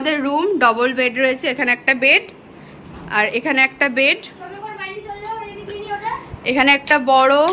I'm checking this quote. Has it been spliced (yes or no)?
no